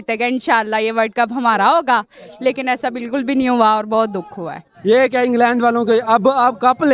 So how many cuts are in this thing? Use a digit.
1